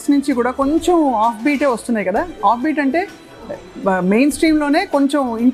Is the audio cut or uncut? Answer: uncut